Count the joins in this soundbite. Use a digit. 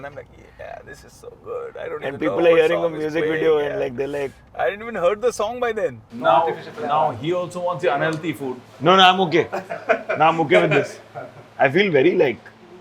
1